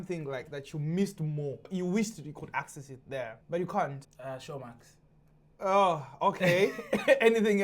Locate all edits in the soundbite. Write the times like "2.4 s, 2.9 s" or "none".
1.6 s, 3.4 s, 4.1 s